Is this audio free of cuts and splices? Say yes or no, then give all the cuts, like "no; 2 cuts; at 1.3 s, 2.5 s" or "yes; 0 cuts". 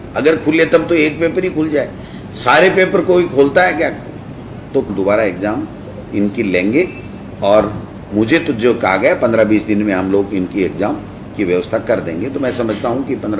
no; 1 cut; at 4.9 s